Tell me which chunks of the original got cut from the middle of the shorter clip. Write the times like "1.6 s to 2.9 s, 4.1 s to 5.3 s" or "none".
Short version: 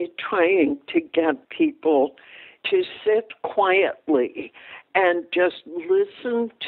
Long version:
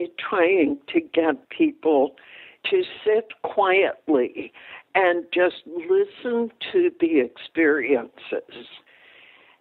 none